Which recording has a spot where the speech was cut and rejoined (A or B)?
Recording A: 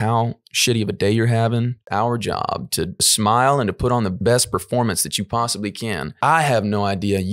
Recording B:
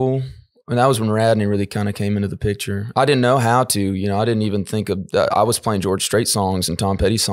A